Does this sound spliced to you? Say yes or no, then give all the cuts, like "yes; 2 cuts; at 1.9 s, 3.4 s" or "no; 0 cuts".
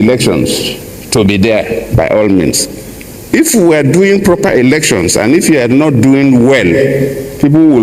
no; 0 cuts